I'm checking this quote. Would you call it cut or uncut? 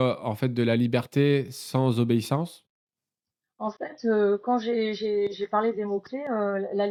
uncut